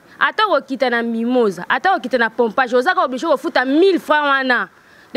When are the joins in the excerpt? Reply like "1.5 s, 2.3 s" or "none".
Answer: none